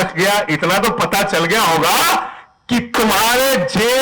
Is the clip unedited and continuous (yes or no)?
yes